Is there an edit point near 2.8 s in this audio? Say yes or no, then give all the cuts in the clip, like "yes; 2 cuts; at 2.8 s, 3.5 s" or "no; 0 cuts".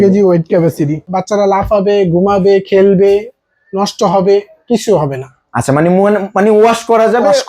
no; 1 cut; at 1.1 s